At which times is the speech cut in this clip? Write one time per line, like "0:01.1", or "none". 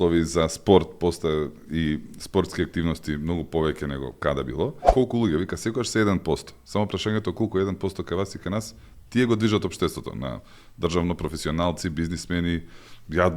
0:04.8